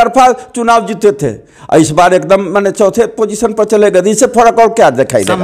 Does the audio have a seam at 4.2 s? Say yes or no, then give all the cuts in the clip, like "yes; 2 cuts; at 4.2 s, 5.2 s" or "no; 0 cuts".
no; 0 cuts